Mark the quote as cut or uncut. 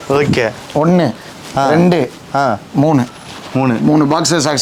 uncut